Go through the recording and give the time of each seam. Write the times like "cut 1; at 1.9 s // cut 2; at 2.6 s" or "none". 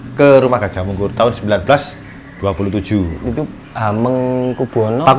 none

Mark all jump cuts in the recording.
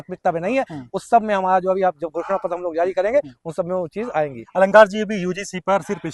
none

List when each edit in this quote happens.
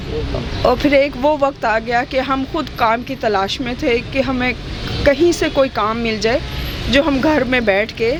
none

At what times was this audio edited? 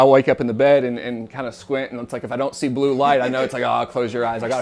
none

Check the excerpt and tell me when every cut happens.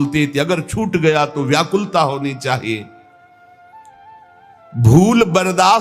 cut 1; at 2.9 s // cut 2; at 4.7 s

